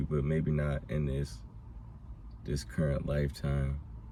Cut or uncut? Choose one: uncut